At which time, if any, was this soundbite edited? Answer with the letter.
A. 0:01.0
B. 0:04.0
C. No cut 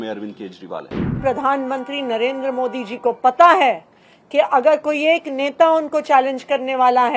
A